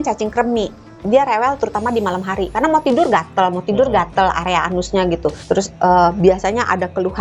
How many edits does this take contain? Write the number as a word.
one